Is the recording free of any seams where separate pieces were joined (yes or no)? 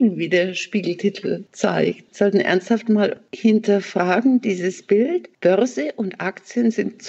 no